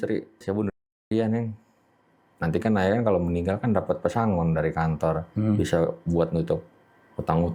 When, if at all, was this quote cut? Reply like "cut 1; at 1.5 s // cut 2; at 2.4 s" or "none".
none